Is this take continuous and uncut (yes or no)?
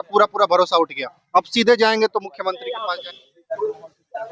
no